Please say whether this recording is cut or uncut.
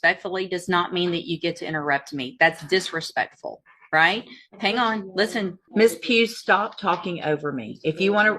cut